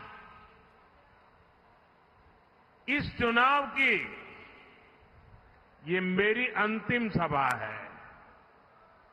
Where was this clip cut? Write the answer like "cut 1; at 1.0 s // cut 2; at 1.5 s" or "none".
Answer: none

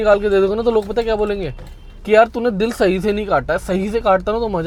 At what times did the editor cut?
none

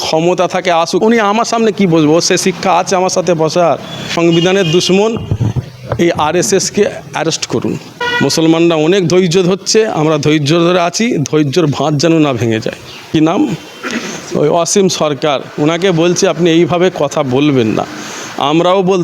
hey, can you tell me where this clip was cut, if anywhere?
cut 1; at 1.0 s // cut 2; at 4.0 s // cut 3; at 8.0 s // cut 4; at 13.0 s

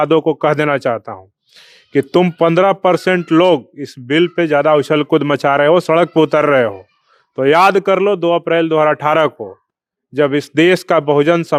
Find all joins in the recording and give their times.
none

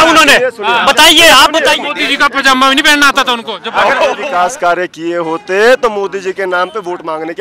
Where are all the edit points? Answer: cut 1; at 1.9 s // cut 2; at 4.2 s

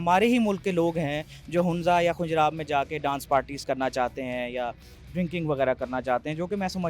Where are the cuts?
none

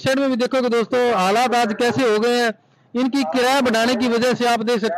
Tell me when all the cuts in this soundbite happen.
none

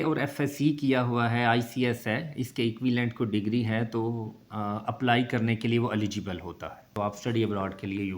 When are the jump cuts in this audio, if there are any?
cut 1; at 6.9 s

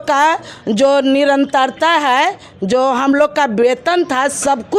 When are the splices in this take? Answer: none

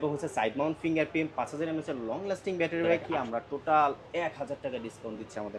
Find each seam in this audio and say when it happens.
cut 1; at 3.1 s

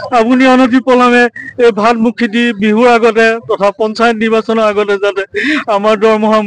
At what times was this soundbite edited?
none

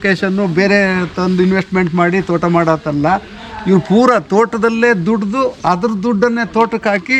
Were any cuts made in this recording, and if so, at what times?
none

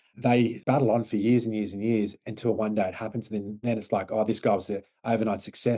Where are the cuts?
none

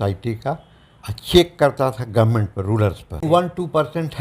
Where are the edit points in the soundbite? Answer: cut 1; at 3.2 s

